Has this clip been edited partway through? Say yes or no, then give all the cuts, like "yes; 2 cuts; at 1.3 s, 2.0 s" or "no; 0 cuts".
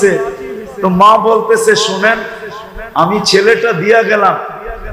no; 0 cuts